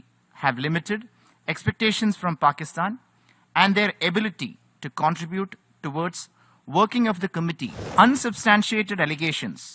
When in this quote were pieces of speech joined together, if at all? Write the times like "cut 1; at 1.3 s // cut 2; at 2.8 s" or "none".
cut 1; at 7.7 s